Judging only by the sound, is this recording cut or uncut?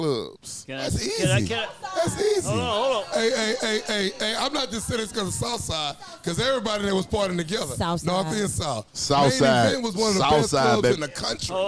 uncut